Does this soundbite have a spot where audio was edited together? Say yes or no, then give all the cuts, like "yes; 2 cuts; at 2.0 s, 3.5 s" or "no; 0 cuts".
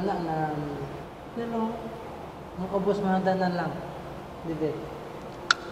no; 0 cuts